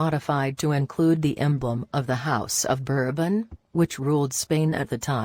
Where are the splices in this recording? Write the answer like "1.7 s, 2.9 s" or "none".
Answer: none